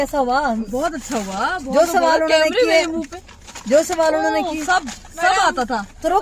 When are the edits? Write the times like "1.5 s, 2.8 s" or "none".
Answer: none